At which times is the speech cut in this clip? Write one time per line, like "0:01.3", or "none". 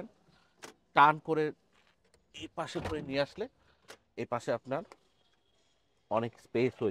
none